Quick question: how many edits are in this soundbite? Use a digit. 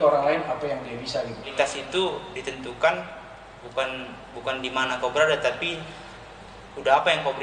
1